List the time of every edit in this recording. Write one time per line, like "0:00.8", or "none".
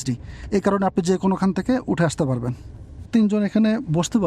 0:03.1